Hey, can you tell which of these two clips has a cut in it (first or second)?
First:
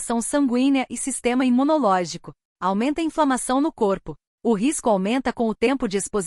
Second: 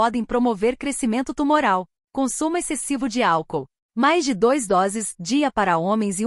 second